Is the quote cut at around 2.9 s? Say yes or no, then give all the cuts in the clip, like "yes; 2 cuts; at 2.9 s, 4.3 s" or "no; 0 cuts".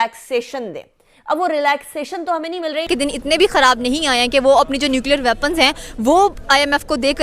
yes; 1 cut; at 2.9 s